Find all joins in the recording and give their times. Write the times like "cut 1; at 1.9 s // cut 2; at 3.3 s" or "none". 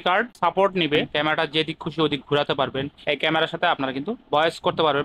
cut 1; at 1.1 s